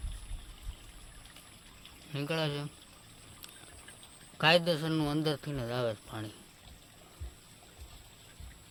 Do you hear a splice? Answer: no; 0 cuts

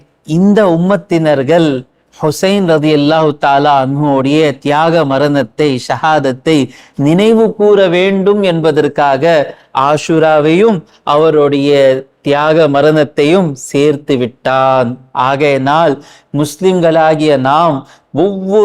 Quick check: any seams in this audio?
no; 0 cuts

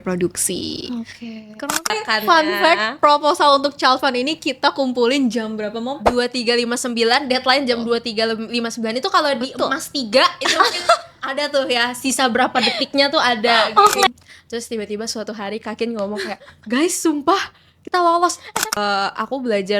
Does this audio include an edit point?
yes; 3 cuts; at 1.6 s, 14.1 s, 18.7 s

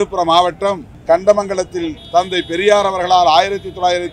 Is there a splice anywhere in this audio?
yes; 2 cuts; at 0.9 s, 2.0 s

